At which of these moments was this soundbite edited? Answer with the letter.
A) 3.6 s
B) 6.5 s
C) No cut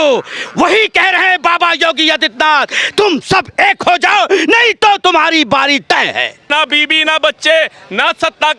B